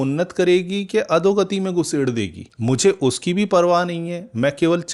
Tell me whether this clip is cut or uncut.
uncut